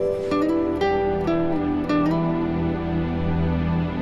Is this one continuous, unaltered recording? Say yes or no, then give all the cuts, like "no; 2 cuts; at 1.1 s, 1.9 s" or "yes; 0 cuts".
no; 1 cut; at 1.1 s